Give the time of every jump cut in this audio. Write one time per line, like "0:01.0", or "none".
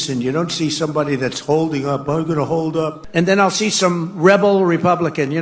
0:03.0

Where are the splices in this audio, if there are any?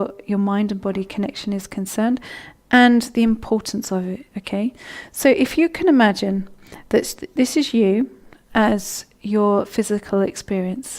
0:06.3

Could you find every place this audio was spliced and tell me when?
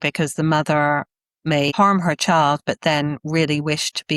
0:01.7

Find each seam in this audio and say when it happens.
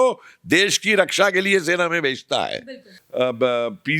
0:03.0

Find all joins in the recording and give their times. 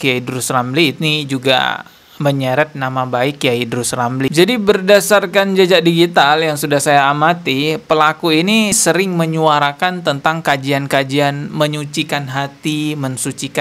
0:04.3

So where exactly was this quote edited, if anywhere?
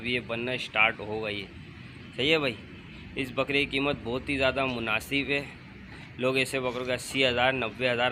none

